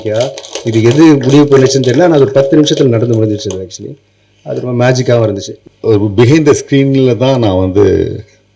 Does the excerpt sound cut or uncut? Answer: cut